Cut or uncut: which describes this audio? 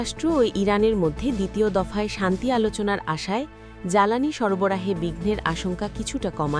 uncut